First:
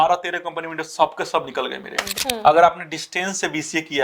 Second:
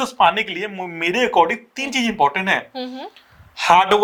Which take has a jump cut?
first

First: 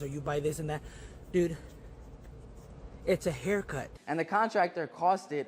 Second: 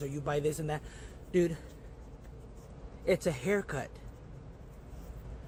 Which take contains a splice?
first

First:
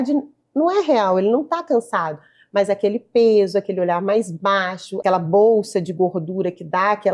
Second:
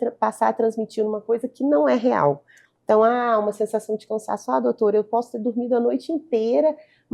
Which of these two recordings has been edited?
first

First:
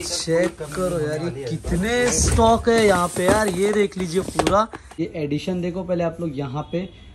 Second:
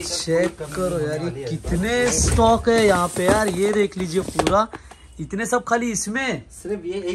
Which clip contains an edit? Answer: first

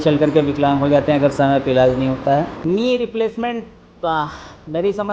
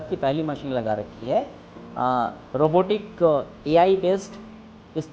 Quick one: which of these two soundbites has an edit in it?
first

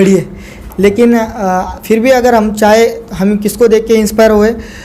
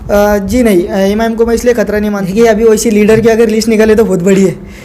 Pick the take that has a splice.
second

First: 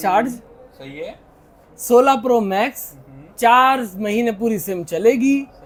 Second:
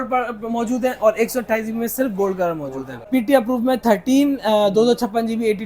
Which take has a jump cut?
second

